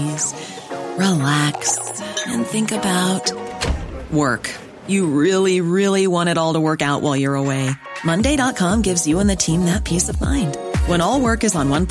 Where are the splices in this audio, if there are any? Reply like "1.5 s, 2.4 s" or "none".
none